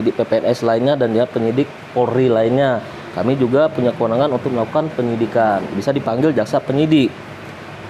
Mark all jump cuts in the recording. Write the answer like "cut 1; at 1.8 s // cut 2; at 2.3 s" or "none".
none